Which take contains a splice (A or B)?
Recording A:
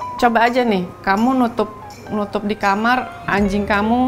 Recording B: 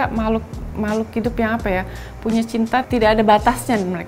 A